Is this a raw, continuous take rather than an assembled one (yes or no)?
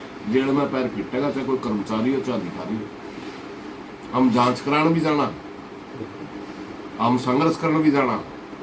yes